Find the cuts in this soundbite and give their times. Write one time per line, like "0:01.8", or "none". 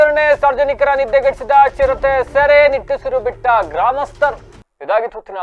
none